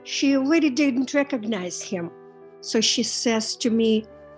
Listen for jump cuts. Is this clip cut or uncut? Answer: uncut